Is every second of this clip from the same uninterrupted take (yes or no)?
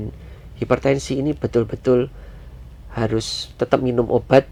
yes